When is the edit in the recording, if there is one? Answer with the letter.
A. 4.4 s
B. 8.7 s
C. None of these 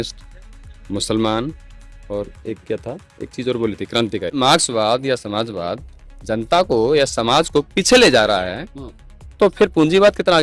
A